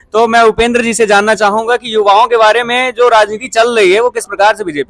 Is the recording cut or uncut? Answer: uncut